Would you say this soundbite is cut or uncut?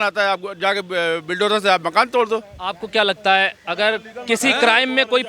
uncut